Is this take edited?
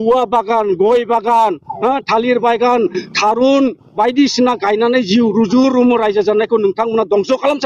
no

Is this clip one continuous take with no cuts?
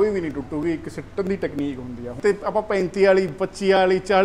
no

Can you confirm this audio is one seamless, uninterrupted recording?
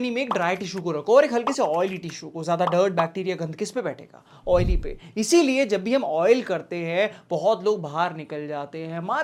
yes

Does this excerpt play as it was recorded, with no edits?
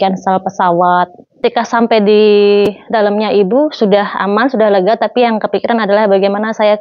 no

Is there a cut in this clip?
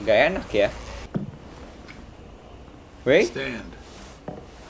yes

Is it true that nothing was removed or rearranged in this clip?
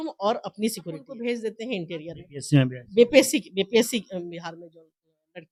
yes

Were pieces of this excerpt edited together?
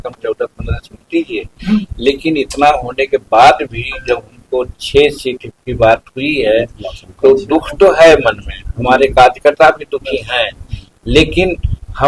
no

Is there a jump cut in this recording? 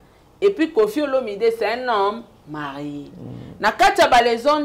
no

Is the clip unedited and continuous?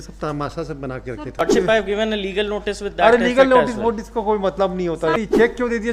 no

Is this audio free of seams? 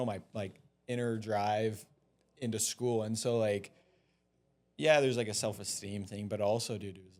yes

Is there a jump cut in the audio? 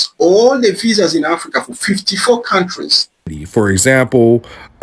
yes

